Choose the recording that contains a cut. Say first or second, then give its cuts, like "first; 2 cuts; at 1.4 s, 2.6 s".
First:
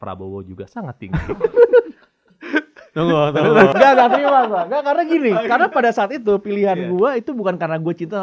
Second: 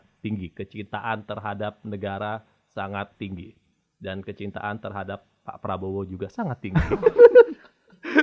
first; 1 cut; at 3.7 s